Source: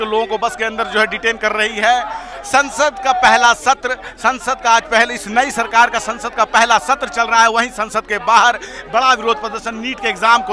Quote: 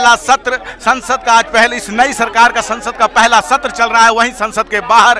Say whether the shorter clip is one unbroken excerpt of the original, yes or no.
yes